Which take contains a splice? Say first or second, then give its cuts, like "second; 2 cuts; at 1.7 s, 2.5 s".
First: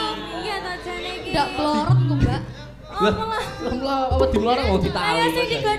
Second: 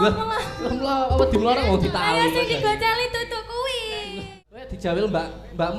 second; 1 cut; at 4.2 s